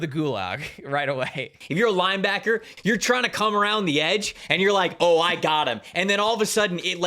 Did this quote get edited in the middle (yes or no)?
yes